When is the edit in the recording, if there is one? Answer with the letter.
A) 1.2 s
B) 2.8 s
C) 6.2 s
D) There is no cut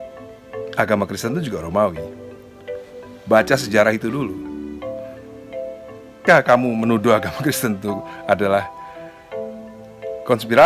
C